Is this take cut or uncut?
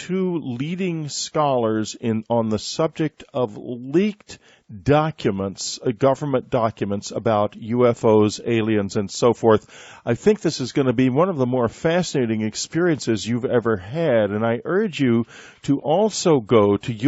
uncut